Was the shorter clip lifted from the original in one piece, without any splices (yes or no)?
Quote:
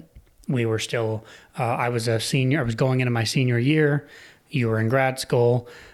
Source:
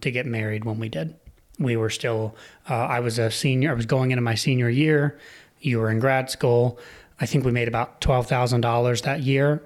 yes